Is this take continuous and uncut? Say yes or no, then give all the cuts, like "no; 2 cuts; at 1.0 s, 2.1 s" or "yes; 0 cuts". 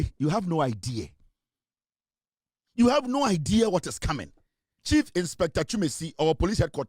no; 1 cut; at 4.7 s